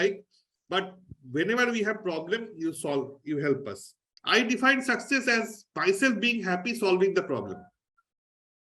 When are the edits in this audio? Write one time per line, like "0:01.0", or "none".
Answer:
0:04.1